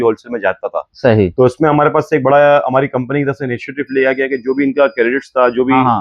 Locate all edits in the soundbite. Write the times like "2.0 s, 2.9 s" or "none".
none